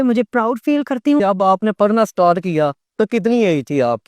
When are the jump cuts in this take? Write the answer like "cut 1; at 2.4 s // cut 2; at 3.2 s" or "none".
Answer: cut 1; at 1.2 s